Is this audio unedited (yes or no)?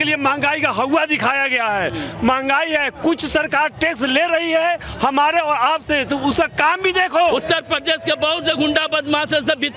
no